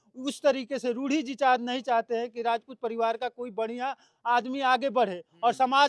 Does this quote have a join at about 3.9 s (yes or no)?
no